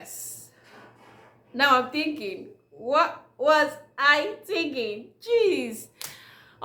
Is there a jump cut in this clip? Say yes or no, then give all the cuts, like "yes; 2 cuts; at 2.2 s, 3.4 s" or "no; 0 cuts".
no; 0 cuts